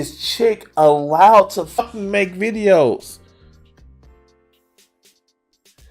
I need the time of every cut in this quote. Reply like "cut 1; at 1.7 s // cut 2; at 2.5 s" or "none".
cut 1; at 1.8 s